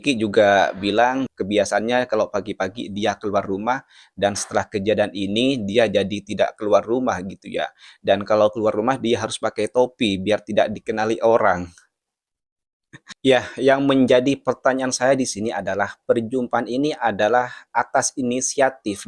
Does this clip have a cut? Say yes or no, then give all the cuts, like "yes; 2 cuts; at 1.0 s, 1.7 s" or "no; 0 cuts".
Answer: yes; 2 cuts; at 1.3 s, 13.1 s